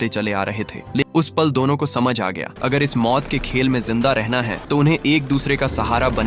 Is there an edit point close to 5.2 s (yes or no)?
no